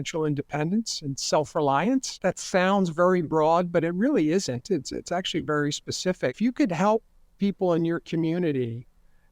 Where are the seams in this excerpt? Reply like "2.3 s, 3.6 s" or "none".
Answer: 2.1 s, 6.4 s